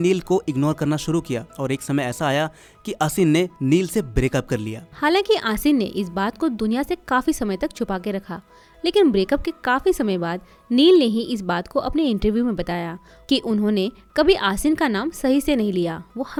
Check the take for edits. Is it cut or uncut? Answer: uncut